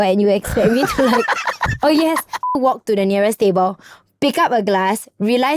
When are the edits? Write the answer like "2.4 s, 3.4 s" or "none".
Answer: 2.5 s